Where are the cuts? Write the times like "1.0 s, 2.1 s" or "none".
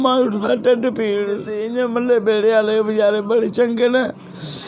1.6 s